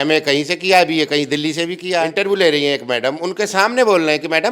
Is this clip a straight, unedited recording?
no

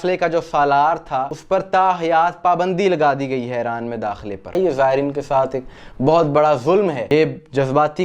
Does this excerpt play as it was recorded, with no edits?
no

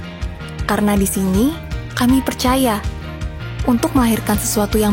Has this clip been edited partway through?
no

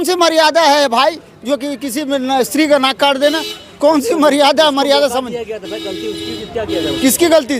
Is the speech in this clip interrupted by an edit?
no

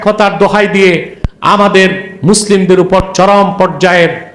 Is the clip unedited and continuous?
yes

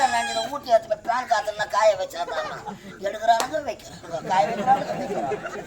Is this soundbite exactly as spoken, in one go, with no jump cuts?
yes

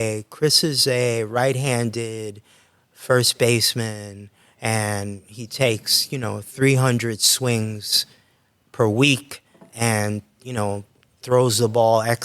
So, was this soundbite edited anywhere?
no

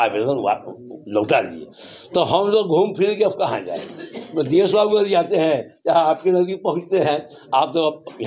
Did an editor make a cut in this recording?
no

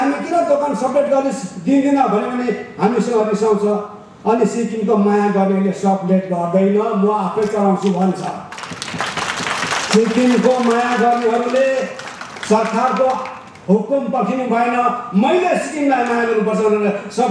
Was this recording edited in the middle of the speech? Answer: no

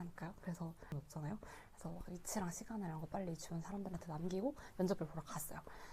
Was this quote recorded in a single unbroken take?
no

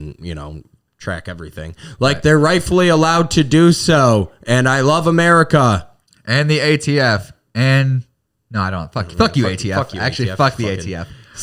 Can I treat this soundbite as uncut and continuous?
yes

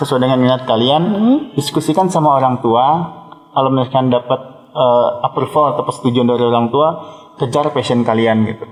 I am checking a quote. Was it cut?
no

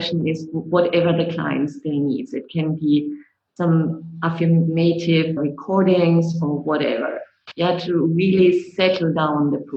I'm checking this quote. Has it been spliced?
yes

